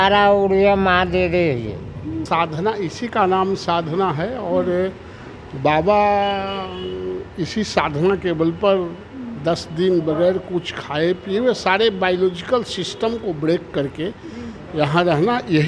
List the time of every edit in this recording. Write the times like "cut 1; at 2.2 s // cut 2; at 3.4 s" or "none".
cut 1; at 2.2 s